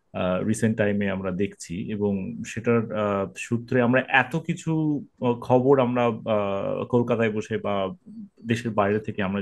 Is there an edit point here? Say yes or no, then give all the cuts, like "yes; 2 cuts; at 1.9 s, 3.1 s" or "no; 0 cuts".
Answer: no; 0 cuts